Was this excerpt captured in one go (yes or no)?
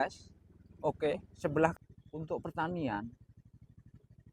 no